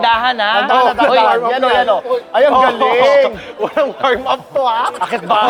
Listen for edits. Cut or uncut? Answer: uncut